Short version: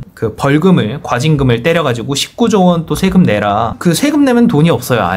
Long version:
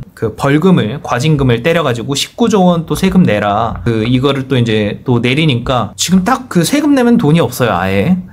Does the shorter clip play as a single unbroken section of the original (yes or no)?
no